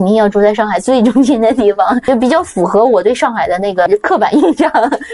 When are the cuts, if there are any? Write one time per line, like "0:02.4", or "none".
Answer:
0:02.0
0:03.8

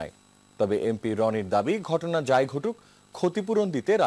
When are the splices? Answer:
0:02.6

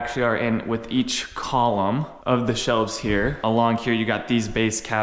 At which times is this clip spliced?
none

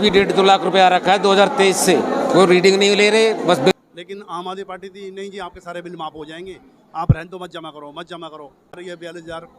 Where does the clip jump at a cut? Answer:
0:03.7
0:08.7

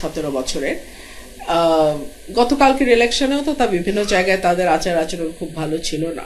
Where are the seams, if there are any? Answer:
none

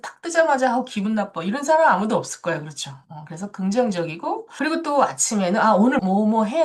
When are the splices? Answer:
none

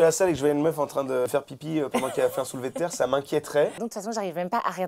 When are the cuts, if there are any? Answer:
0:01.3
0:03.8

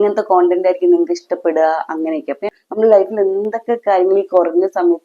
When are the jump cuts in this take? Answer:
0:02.5

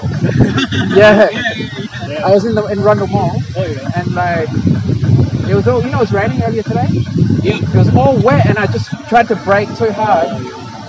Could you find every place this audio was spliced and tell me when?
none

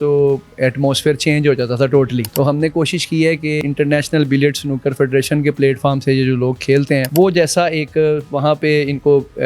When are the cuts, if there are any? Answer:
0:02.3
0:03.6
0:07.1

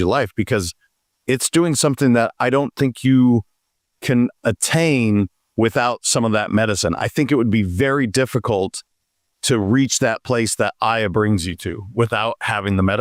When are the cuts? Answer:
none

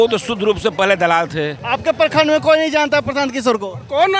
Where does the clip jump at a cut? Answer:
0:01.6

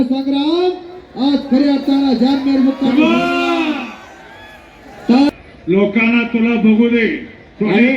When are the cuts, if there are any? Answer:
0:05.3

